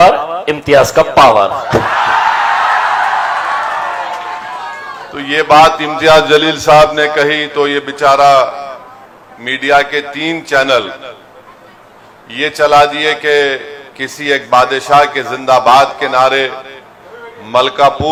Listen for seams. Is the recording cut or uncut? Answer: uncut